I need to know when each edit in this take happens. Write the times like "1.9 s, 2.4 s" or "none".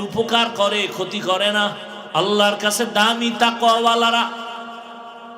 1.9 s